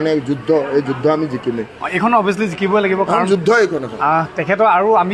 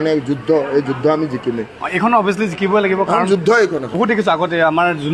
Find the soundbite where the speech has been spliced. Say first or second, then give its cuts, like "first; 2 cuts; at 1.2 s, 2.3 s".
second; 1 cut; at 3.8 s